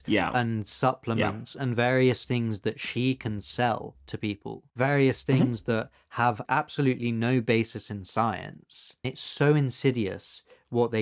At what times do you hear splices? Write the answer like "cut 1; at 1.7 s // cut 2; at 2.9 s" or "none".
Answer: cut 1; at 9.0 s

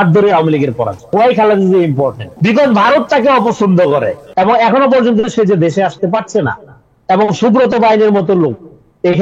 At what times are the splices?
cut 1; at 1.1 s // cut 2; at 2.3 s // cut 3; at 4.2 s

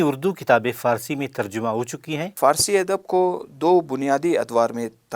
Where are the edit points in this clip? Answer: cut 1; at 2.3 s

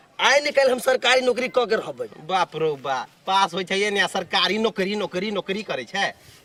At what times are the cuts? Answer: none

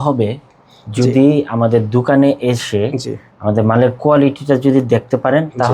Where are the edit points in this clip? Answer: none

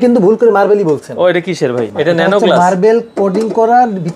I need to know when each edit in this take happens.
cut 1; at 1.9 s

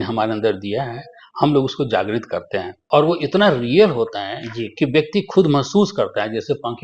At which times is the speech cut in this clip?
cut 1; at 2.7 s

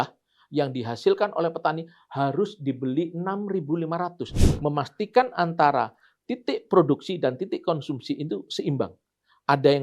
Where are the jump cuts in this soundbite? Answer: cut 1; at 4.2 s

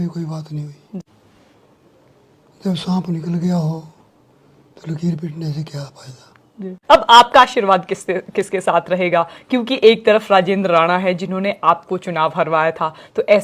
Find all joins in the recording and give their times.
cut 1; at 1.0 s // cut 2; at 6.8 s

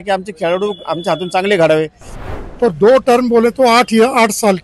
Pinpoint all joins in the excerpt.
cut 1; at 2.3 s

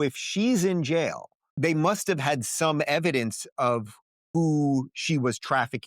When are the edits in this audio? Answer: cut 1; at 1.5 s

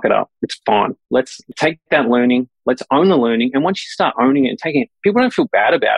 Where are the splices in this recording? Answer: cut 1; at 1.1 s

